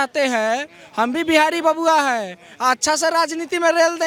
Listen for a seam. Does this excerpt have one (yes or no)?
no